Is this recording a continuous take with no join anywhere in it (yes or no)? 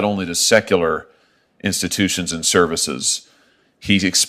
yes